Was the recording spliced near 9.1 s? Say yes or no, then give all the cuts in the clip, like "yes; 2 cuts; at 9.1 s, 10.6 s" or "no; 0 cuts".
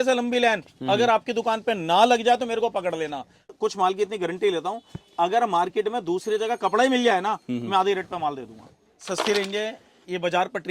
yes; 2 cuts; at 3.5 s, 9.1 s